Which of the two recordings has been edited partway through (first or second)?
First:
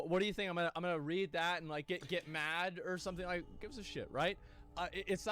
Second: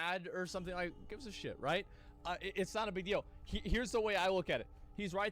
second